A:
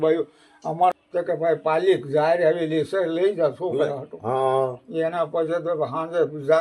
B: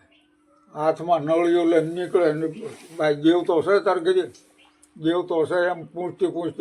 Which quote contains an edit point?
A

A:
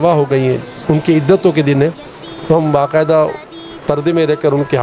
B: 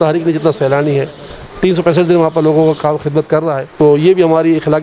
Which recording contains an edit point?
B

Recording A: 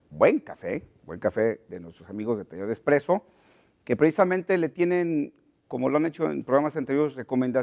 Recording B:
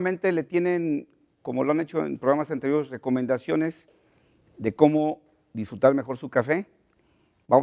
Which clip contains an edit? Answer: B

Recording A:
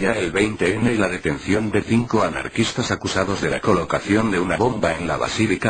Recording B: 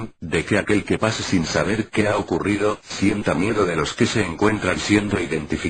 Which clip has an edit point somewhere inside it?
B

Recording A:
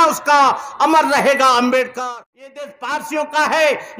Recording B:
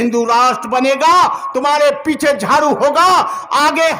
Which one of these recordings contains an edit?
A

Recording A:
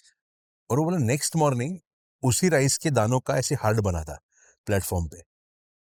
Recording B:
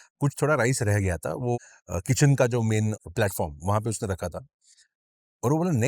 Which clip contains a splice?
B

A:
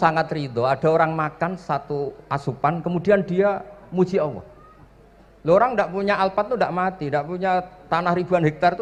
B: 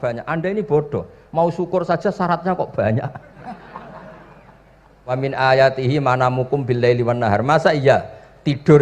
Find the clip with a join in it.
B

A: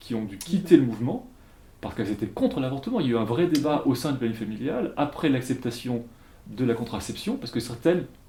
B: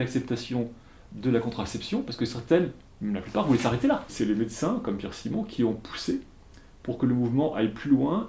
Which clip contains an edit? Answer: B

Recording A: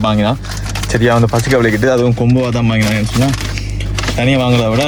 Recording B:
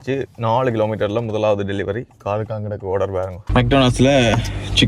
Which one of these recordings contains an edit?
B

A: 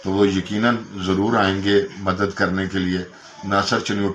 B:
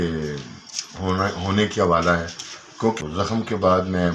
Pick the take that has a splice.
B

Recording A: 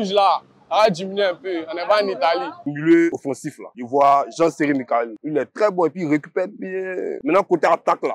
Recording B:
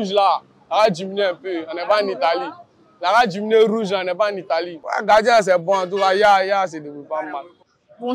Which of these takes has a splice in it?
A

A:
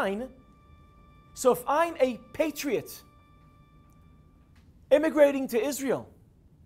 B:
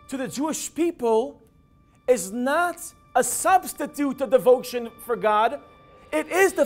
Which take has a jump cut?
B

